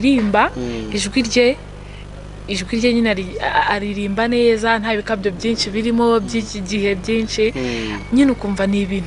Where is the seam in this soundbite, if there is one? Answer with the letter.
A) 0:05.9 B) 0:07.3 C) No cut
C